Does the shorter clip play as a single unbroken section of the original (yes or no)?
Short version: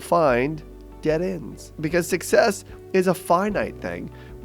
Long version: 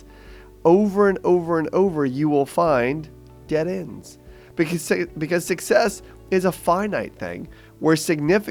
no